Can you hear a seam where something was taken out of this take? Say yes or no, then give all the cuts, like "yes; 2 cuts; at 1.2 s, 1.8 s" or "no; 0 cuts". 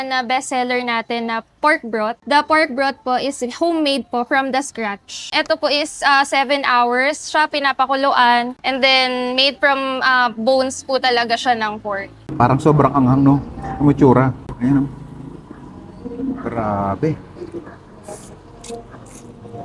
yes; 3 cuts; at 2.2 s, 5.3 s, 12.2 s